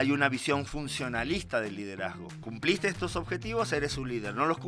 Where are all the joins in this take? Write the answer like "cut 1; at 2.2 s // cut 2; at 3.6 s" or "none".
none